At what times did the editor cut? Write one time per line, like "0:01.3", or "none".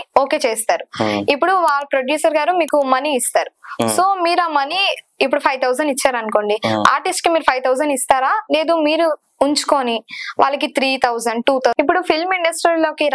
0:11.7